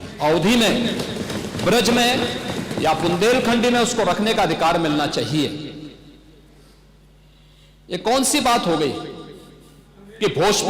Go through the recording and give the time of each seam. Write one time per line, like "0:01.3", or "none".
none